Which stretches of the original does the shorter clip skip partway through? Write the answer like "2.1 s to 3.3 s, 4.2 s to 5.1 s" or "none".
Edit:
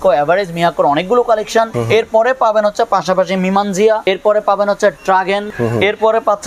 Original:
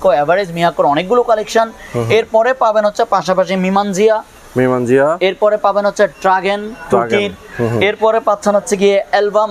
1.8 s to 2.0 s, 4.2 s to 5.2 s, 6.7 s to 7.5 s